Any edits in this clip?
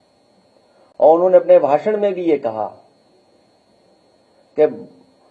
yes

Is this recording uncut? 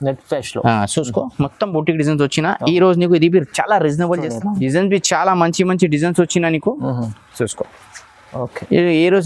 no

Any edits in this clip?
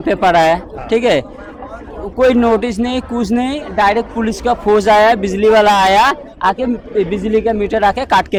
no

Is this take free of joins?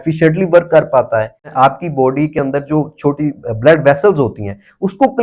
no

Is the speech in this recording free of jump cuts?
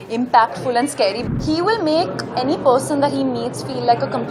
no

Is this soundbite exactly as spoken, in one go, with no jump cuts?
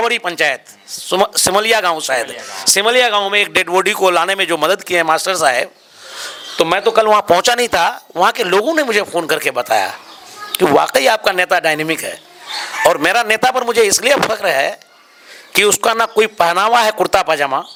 yes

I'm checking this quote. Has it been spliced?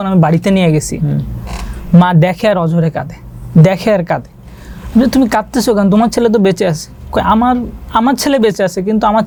no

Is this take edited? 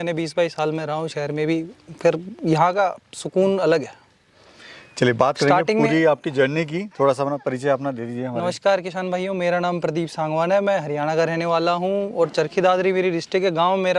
no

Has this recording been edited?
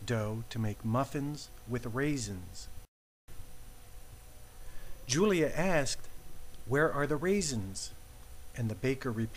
yes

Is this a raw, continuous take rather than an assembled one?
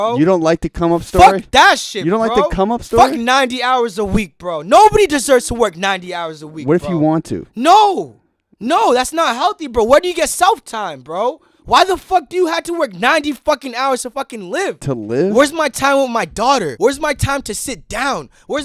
no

